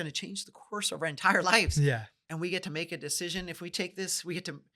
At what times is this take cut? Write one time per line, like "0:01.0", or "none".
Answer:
0:02.2